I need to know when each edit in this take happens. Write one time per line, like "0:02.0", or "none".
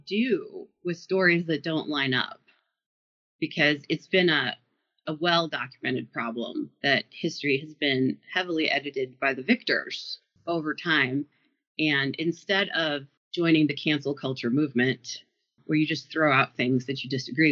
none

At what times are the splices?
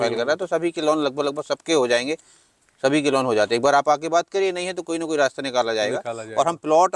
none

